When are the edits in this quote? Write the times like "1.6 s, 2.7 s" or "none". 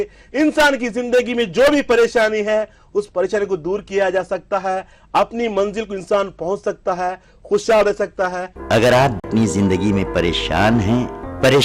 8.4 s, 9.2 s